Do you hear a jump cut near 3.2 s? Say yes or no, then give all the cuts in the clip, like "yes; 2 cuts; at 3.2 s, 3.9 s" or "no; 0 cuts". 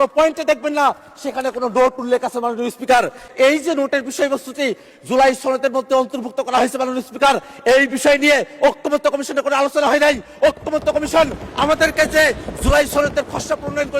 yes; 1 cut; at 3.2 s